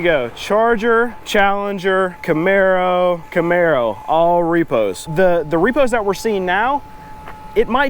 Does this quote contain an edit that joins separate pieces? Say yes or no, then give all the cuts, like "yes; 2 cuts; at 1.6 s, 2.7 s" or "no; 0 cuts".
yes; 4 cuts; at 1.2 s, 2.2 s, 3.2 s, 5.1 s